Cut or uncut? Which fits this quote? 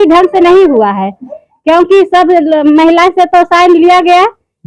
uncut